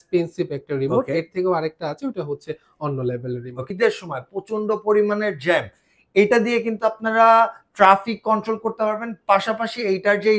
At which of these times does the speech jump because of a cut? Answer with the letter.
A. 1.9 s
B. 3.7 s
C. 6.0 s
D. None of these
B